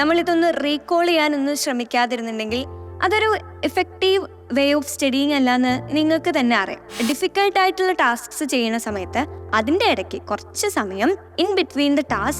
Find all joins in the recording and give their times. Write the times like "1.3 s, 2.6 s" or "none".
6.8 s